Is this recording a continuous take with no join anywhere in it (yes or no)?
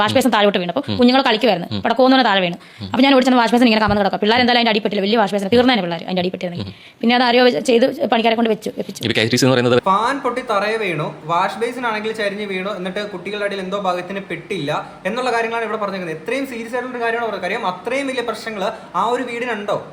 yes